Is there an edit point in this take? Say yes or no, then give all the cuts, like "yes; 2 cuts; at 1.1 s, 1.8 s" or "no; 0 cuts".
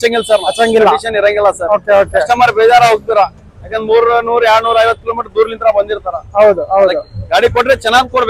no; 0 cuts